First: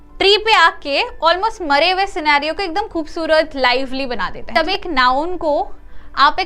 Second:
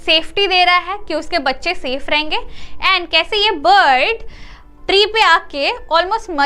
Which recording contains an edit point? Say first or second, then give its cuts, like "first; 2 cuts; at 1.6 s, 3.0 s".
first; 1 cut; at 4.5 s